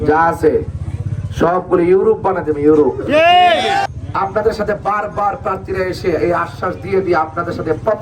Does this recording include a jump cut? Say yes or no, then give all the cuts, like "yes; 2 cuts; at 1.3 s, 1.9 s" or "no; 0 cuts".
yes; 1 cut; at 3.9 s